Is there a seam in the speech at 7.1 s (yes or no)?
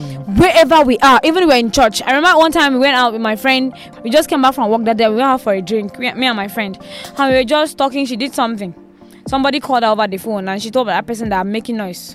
no